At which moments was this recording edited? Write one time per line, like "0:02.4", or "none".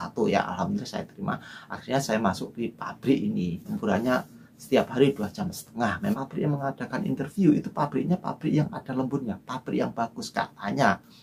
0:03.7
0:06.1